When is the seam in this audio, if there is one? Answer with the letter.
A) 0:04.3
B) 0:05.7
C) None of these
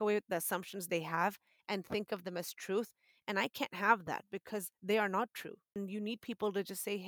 B